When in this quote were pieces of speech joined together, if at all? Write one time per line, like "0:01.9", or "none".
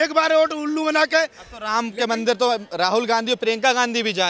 none